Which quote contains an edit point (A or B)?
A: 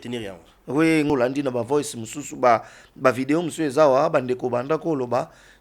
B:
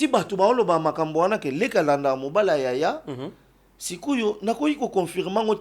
A